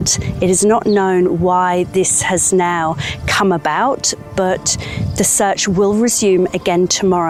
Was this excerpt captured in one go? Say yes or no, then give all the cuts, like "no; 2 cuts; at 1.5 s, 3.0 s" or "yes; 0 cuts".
yes; 0 cuts